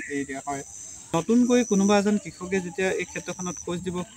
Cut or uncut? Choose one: cut